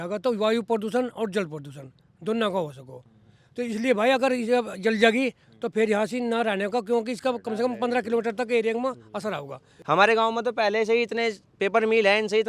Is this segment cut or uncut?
cut